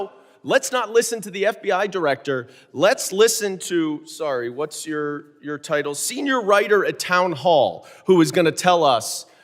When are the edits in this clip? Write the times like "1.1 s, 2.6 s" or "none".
none